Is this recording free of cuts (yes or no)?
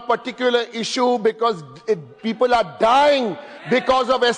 yes